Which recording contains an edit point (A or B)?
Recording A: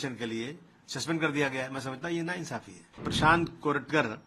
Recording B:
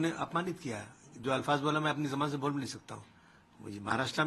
A